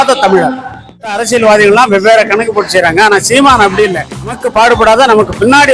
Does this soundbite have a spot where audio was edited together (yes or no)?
yes